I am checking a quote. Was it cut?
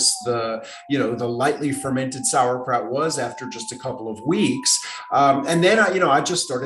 no; 0 cuts

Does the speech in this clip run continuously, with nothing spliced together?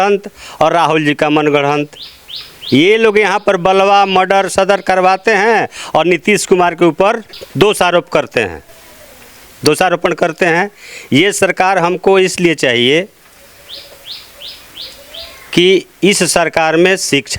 yes; 0 cuts

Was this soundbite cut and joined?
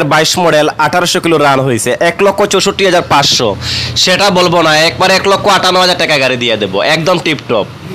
no; 0 cuts

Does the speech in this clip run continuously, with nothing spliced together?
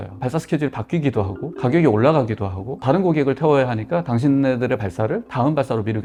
yes; 0 cuts

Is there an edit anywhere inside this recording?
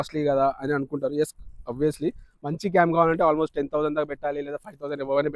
no; 0 cuts

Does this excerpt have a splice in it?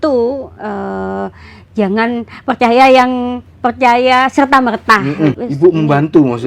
yes; 1 cut; at 5.4 s

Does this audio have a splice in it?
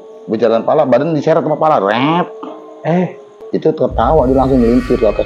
yes; 1 cut; at 3.4 s

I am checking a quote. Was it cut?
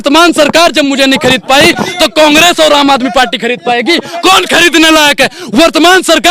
no; 0 cuts

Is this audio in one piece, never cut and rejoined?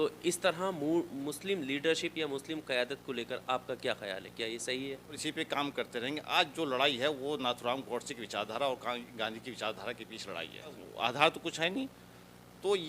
no; 2 cuts; at 5.2 s, 10.8 s

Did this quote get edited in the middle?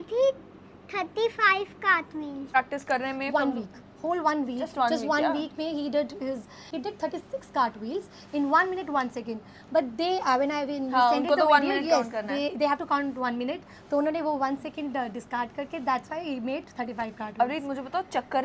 yes; 2 cuts; at 2.5 s, 6.6 s

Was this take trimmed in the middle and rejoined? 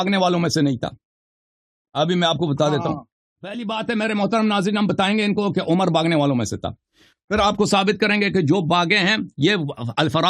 yes; 1 cut; at 3.6 s

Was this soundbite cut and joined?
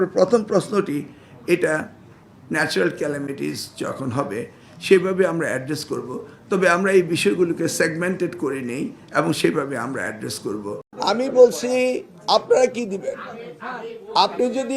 yes; 1 cut; at 10.9 s

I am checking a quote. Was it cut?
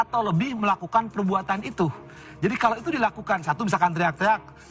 no; 0 cuts

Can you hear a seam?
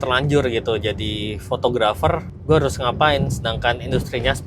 yes; 1 cut; at 2.3 s

